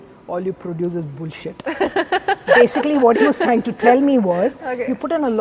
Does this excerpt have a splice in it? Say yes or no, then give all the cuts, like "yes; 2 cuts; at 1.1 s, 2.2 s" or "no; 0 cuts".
no; 0 cuts